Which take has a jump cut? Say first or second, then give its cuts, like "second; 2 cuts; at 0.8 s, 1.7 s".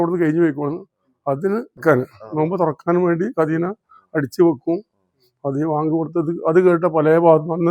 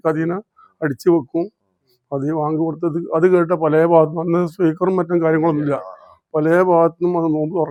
first; 1 cut; at 1.8 s